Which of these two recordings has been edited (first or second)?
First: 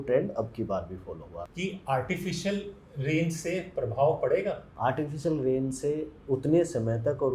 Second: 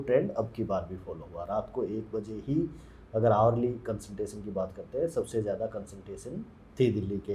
first